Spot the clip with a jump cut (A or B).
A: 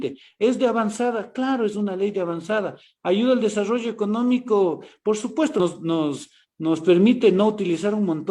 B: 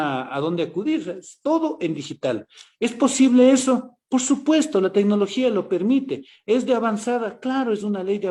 A